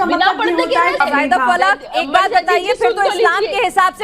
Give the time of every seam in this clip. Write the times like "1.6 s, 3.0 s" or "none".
1.0 s